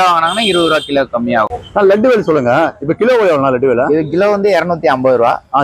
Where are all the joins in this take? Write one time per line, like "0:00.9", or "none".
0:01.5

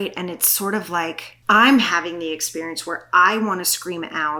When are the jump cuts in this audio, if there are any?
none

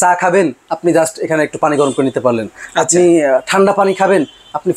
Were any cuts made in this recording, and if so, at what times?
none

